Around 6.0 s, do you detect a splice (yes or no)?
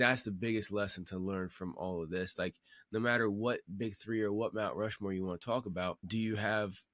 yes